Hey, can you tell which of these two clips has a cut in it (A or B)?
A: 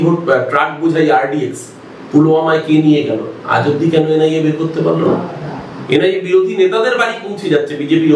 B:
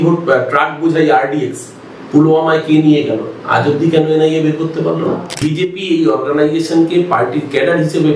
B